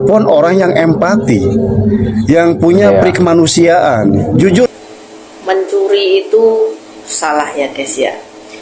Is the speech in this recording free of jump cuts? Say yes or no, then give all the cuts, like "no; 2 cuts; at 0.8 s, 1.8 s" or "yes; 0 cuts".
no; 1 cut; at 4.7 s